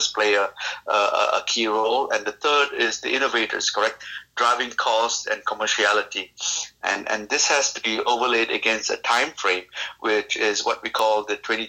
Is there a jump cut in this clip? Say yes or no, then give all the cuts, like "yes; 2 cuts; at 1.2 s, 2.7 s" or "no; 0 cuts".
no; 0 cuts